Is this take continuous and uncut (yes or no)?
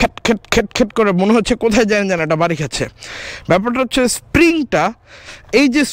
yes